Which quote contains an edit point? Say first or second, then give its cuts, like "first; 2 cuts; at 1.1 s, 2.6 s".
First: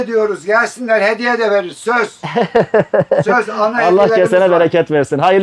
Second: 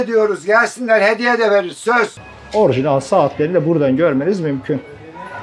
second; 1 cut; at 2.2 s